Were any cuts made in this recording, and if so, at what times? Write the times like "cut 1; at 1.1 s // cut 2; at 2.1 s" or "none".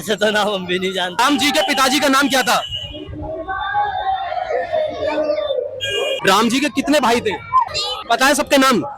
cut 1; at 1.2 s // cut 2; at 6.2 s // cut 3; at 8.0 s